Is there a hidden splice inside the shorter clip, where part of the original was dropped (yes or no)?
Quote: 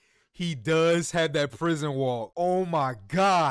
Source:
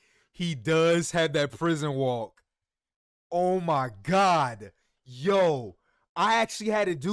yes